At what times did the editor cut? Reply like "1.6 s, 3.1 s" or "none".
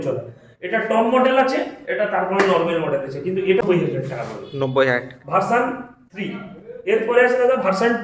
3.6 s